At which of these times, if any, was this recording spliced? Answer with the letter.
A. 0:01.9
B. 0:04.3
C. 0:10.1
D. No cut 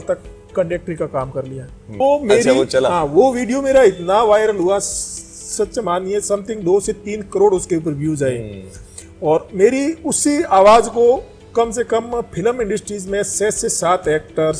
A